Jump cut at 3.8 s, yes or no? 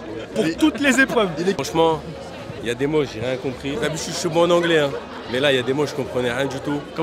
yes